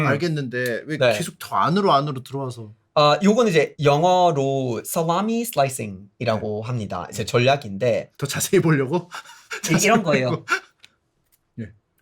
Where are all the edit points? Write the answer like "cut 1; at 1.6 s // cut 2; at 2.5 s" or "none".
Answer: none

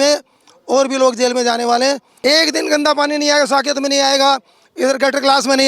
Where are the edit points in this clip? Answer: cut 1; at 2.1 s

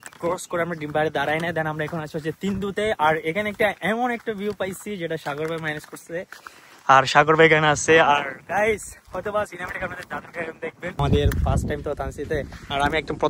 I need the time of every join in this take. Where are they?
cut 1; at 11.0 s

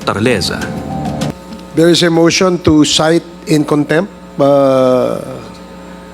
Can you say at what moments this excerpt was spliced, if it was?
cut 1; at 1.4 s

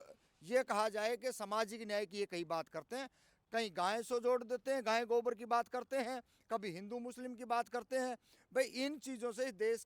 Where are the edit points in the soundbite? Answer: cut 1; at 3.4 s

